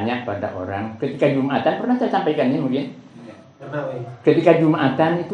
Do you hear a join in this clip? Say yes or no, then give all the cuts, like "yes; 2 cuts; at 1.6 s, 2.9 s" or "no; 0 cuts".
no; 0 cuts